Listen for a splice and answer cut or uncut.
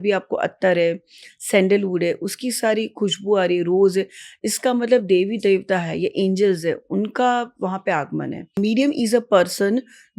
cut